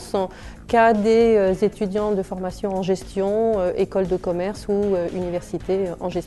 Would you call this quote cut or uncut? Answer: cut